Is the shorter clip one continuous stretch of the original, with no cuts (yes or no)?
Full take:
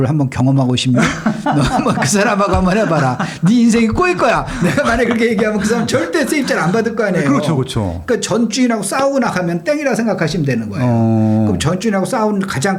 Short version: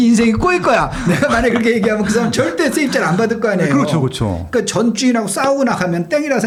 yes